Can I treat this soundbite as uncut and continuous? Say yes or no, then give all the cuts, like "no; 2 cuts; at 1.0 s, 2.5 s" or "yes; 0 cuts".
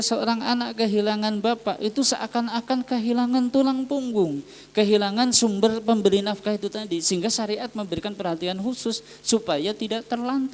yes; 0 cuts